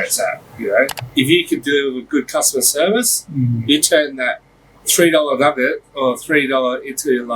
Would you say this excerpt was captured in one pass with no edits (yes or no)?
no